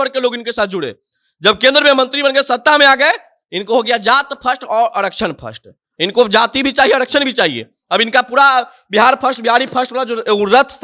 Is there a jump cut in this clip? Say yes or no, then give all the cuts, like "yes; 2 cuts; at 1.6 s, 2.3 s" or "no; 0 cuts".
no; 0 cuts